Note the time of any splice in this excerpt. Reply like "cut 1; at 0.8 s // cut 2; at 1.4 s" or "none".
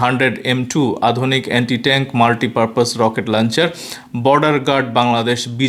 none